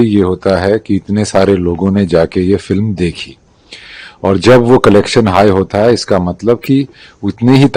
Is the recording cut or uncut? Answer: uncut